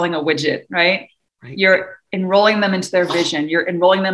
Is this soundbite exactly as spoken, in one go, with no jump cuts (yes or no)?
yes